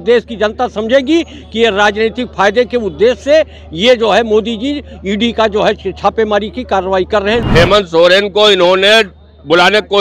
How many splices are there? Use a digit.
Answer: 1